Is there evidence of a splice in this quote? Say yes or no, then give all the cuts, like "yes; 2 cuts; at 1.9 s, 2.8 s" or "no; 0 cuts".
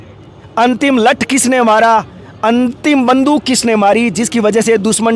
no; 0 cuts